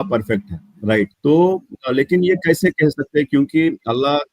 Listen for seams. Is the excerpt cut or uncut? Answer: cut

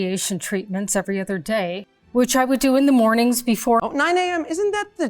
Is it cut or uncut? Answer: cut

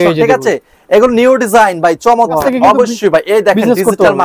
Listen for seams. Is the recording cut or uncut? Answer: cut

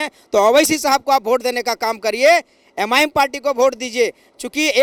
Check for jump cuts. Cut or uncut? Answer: uncut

